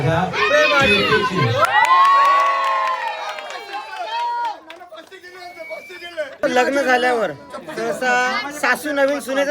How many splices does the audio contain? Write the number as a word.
one